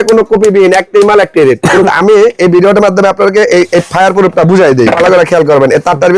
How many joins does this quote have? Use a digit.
2